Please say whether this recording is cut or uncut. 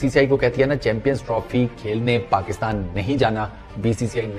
uncut